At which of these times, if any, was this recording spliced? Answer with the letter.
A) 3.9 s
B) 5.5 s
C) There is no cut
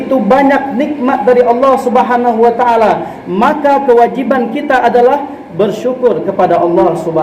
C